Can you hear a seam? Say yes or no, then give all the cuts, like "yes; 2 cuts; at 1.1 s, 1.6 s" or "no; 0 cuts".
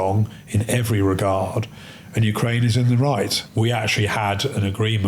yes; 1 cut; at 3.4 s